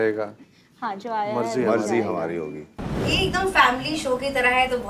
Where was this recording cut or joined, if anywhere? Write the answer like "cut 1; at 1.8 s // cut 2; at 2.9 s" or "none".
cut 1; at 2.9 s